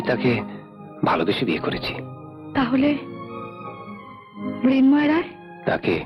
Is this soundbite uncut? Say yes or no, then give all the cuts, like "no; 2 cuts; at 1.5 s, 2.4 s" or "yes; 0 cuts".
yes; 0 cuts